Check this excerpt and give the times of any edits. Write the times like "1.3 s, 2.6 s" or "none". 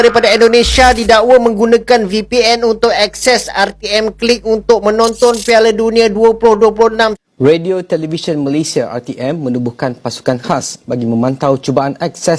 7.1 s